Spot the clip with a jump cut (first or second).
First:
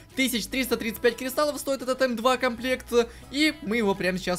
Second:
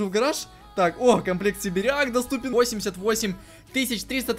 second